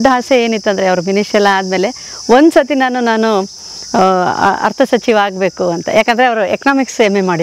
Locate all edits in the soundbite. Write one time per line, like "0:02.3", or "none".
none